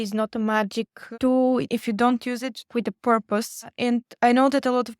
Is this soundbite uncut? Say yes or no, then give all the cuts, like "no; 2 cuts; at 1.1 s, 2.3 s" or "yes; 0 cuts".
no; 2 cuts; at 1.7 s, 2.7 s